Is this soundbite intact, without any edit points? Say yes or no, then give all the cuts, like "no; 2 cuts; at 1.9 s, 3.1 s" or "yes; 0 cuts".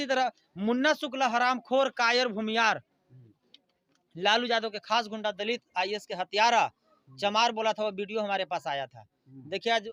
yes; 0 cuts